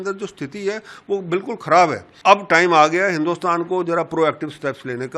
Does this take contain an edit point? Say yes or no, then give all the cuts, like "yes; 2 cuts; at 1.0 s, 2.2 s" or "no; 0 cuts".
yes; 1 cut; at 2.1 s